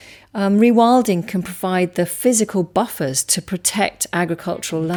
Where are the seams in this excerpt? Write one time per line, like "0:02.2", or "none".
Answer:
none